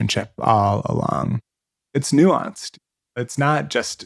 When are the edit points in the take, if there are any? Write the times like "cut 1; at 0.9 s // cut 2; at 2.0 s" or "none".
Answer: cut 1; at 1.7 s